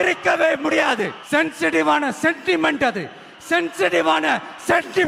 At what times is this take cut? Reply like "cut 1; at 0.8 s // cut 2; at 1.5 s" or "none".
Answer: cut 1; at 1.2 s